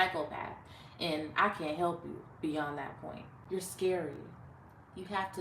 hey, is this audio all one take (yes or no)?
no